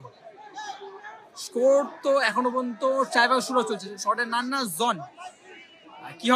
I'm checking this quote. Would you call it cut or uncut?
uncut